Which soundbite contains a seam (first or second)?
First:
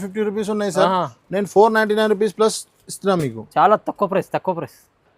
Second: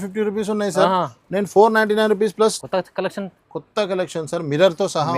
second